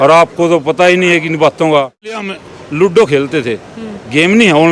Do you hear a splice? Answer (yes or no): yes